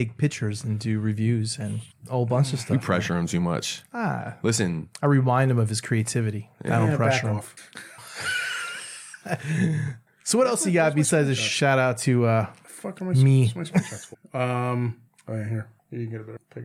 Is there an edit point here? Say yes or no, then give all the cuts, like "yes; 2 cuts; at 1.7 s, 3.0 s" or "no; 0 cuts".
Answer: no; 0 cuts